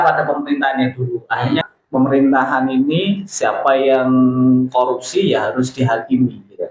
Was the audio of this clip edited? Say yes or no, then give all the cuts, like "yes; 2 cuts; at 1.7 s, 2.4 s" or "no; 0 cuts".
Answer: yes; 1 cut; at 1.6 s